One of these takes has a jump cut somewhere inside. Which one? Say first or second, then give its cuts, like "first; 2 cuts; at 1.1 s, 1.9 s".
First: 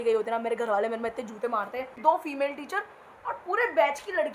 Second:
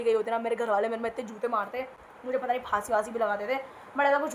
first; 1 cut; at 1.9 s